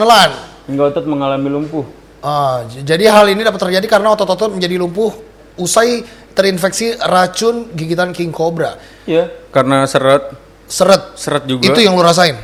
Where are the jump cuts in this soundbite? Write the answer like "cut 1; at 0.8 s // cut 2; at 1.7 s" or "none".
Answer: none

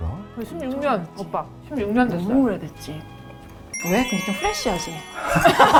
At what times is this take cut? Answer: none

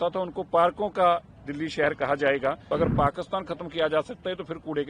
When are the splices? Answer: cut 1; at 2.6 s

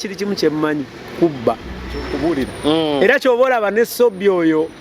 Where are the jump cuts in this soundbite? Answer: cut 1; at 2.1 s

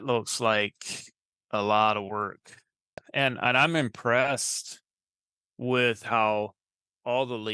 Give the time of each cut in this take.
cut 1; at 3.0 s

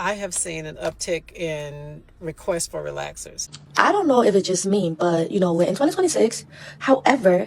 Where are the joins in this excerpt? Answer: cut 1; at 3.6 s

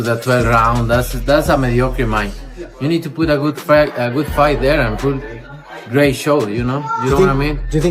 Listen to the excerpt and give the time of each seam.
cut 1; at 5.8 s

